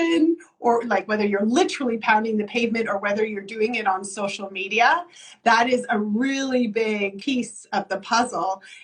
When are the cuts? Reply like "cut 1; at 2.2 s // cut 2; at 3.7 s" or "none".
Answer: cut 1; at 7.2 s